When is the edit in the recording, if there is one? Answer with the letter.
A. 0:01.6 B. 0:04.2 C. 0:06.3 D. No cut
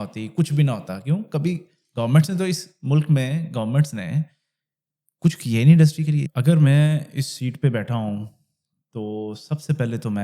C